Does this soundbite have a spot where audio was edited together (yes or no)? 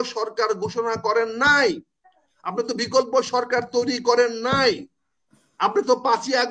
no